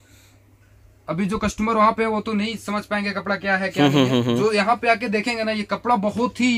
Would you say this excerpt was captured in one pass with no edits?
yes; 0 cuts

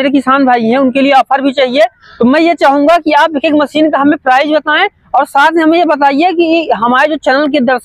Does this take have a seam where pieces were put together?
no; 0 cuts

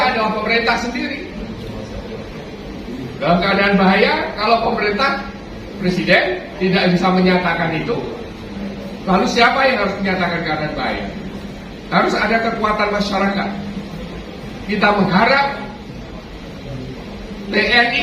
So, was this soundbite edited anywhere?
yes; 1 cut; at 15.8 s

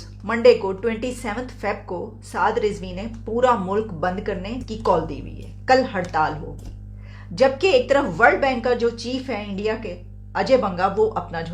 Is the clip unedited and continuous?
no; 1 cut; at 4.6 s

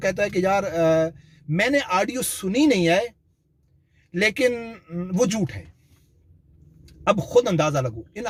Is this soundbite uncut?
yes; 0 cuts

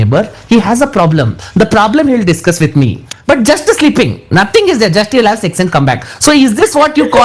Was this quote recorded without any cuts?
yes; 0 cuts

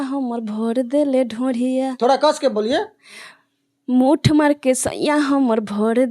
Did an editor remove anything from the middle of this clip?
no; 0 cuts

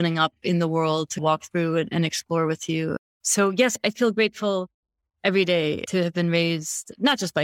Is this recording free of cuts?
no; 1 cut; at 3.1 s

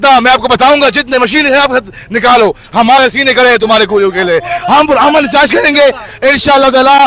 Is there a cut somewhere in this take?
no; 0 cuts

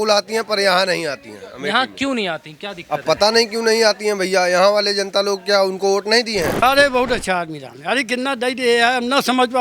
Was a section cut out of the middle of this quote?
yes; 1 cut; at 6.6 s

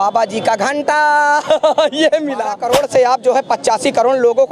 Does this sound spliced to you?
yes; 1 cut; at 2.6 s

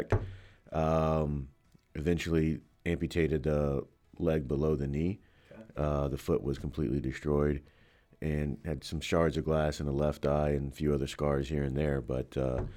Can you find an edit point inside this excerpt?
no; 0 cuts

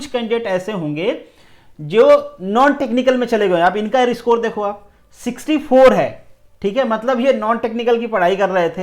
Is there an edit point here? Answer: no; 0 cuts

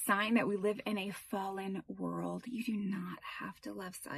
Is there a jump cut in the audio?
no; 0 cuts

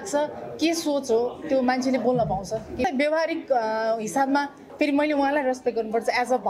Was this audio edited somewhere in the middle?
yes; 1 cut; at 2.9 s

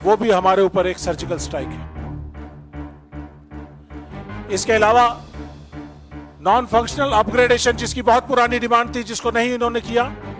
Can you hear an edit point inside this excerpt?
yes; 2 cuts; at 2.3 s, 4.4 s

